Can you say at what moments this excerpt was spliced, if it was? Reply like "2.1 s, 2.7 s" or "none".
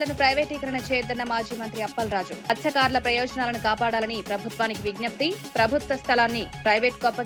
none